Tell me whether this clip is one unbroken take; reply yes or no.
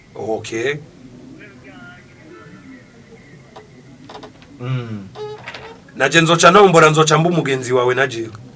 yes